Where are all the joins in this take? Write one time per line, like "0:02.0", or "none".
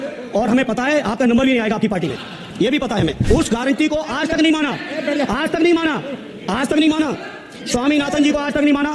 0:03.2